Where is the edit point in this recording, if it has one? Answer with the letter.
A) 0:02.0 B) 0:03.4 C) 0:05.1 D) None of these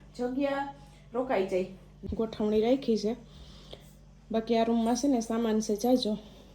A